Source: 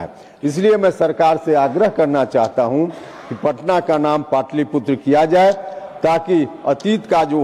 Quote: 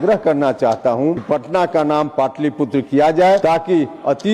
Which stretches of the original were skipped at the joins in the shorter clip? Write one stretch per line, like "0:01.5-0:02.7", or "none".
0:02.9-0:03.3
0:05.5-0:06.0